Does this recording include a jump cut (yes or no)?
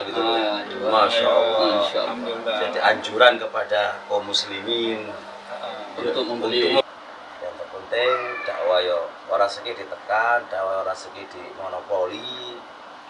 yes